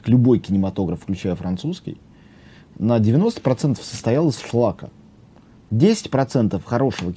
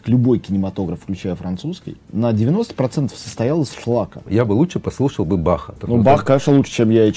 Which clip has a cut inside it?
second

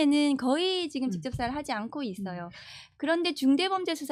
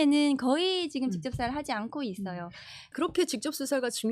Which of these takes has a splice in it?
second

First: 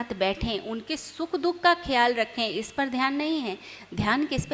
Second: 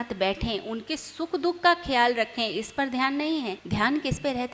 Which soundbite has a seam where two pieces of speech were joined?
second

